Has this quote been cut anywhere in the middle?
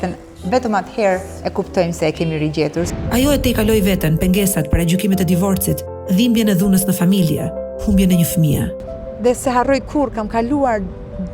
yes; 2 cuts; at 3.0 s, 8.8 s

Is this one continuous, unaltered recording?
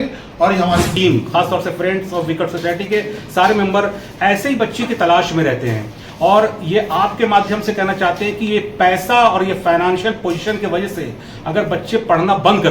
no; 1 cut; at 0.9 s

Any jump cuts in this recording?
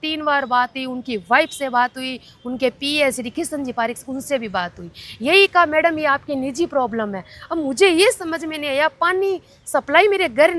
no; 0 cuts

